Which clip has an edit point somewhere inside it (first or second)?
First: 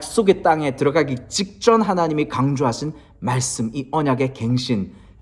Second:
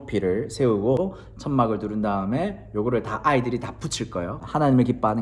second